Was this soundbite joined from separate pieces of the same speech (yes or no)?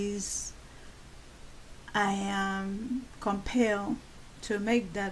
yes